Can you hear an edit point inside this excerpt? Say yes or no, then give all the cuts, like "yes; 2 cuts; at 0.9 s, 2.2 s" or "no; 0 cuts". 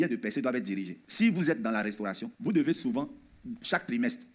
yes; 2 cuts; at 1.0 s, 2.3 s